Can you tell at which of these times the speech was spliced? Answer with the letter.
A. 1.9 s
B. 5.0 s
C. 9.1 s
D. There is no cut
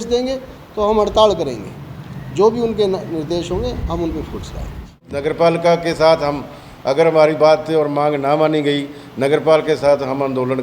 B